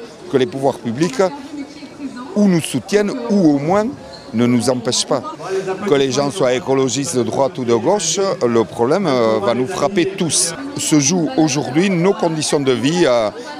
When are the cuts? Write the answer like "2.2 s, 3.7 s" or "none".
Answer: 5.8 s